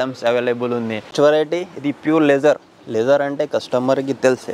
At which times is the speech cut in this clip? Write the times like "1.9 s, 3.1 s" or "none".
1.0 s